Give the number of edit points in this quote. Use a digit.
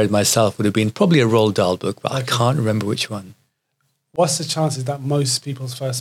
0